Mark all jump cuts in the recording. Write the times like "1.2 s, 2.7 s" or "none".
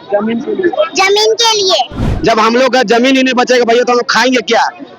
2.1 s